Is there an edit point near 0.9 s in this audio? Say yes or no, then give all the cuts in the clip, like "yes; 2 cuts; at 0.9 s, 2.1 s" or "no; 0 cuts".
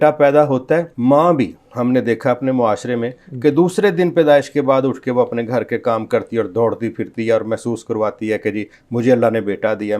yes; 1 cut; at 0.9 s